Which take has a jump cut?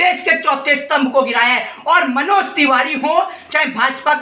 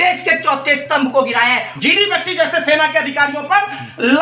second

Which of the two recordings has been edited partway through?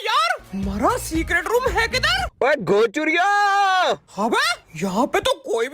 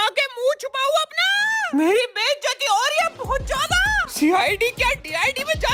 first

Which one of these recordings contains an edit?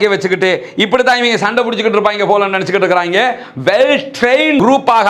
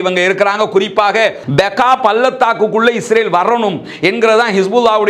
second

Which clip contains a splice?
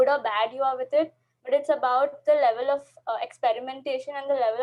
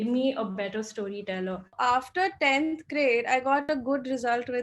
second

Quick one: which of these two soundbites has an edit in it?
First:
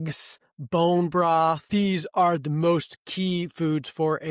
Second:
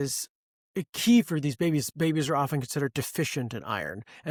first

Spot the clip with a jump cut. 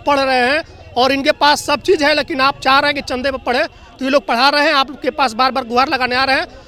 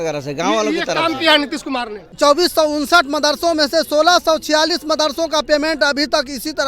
second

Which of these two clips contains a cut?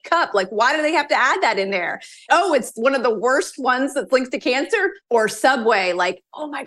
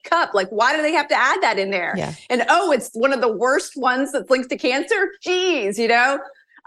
first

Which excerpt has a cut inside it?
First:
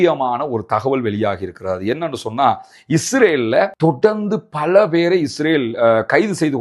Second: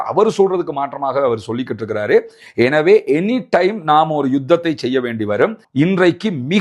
second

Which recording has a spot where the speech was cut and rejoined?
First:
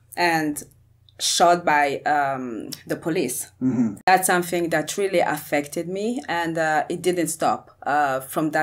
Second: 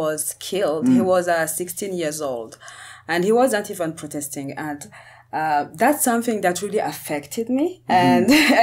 first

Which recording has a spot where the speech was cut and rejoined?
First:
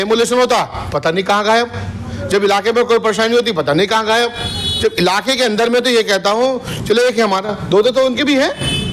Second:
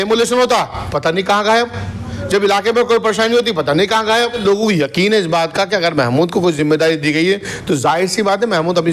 second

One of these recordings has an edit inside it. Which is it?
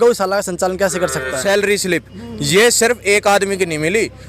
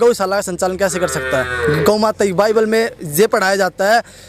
first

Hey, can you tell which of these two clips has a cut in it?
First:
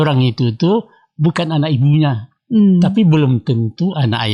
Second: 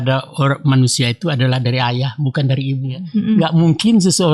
second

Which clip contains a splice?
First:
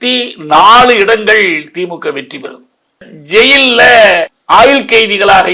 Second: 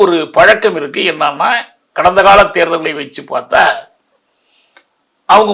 first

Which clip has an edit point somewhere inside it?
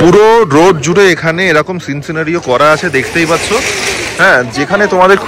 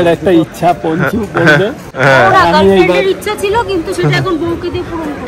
second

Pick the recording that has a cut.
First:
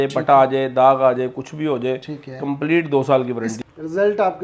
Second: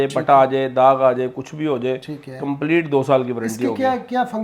first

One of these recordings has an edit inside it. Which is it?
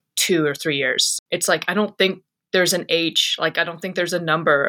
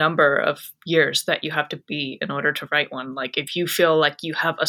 first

